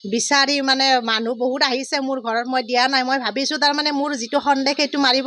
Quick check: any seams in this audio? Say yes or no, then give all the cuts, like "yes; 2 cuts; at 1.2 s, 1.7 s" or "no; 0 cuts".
no; 0 cuts